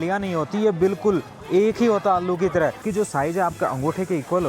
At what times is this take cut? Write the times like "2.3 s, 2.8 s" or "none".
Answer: 2.8 s